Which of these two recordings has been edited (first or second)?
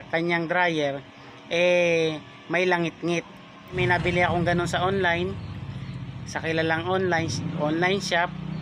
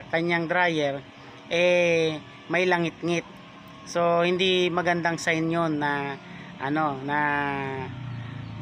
first